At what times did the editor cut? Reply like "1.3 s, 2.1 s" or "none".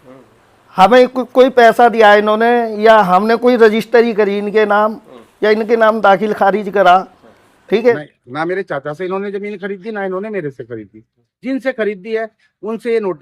7.9 s

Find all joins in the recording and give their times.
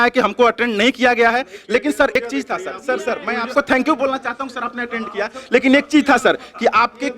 2.2 s, 3.5 s

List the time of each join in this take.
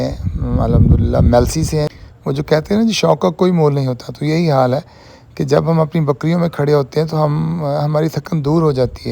1.9 s

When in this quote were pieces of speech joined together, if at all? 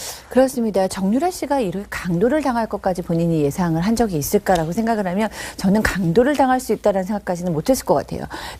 5.7 s

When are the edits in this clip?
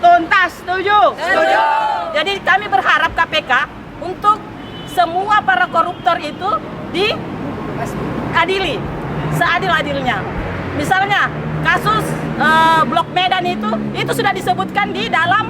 2.0 s

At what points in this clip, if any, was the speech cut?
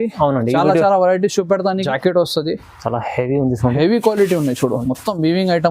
1.8 s

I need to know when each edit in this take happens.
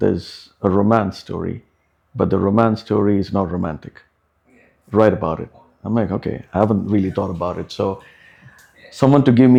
none

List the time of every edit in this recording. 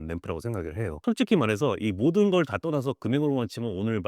1.0 s

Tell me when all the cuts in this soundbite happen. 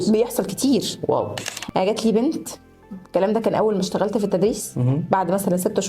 1.5 s

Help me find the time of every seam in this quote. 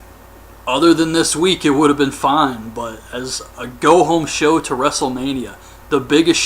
3.9 s

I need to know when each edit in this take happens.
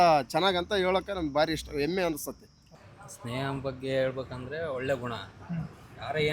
2.6 s

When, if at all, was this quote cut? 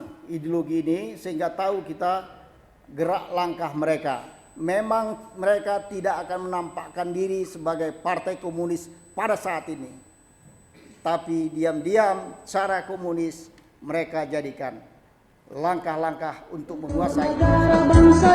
17.1 s

